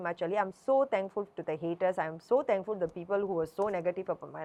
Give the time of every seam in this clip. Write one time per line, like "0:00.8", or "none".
none